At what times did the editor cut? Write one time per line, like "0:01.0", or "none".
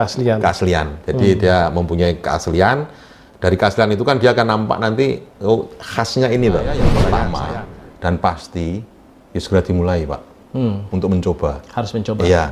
0:07.0